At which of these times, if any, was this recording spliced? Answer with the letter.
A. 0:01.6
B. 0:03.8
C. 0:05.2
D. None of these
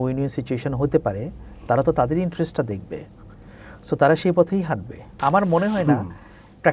C